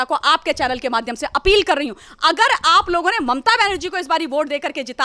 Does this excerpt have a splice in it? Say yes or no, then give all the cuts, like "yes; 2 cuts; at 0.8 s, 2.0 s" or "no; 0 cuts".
no; 0 cuts